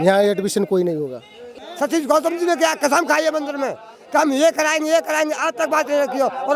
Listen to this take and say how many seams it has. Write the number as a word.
one